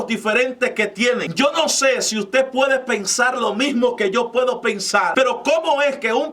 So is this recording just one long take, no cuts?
no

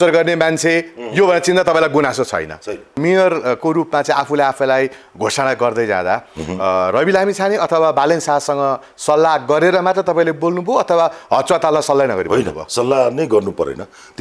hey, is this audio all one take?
no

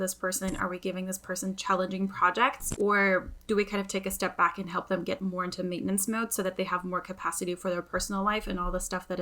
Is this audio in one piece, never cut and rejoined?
no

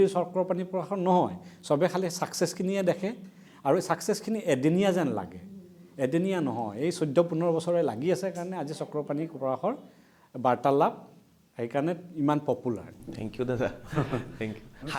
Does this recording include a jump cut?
no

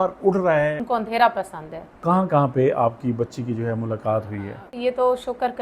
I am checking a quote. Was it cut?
yes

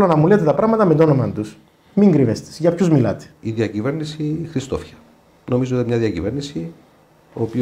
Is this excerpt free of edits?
no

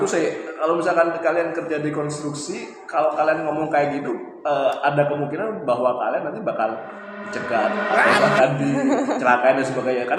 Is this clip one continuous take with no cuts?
yes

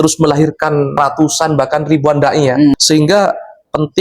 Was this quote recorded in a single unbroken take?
no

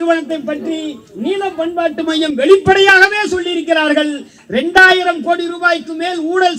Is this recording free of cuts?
yes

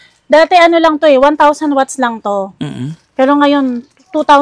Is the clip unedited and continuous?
yes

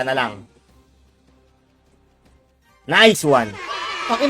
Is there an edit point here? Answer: no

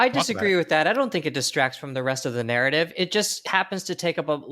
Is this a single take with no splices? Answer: no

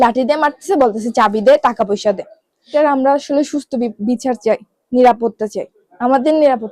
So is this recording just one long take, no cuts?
no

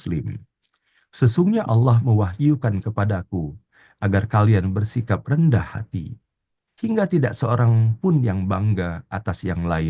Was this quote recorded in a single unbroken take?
yes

